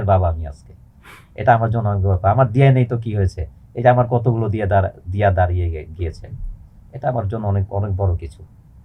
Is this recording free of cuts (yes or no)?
yes